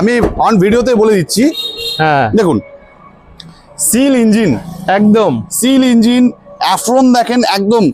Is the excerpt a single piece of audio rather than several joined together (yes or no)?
yes